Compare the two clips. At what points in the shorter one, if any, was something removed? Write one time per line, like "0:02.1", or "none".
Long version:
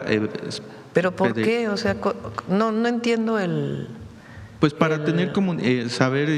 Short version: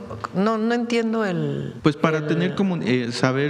0:01.7